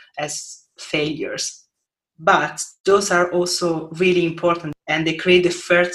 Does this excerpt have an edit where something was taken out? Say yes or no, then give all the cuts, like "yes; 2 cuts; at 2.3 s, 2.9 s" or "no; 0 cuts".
yes; 1 cut; at 4.7 s